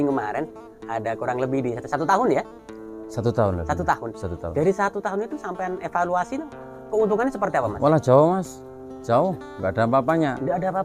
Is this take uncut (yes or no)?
yes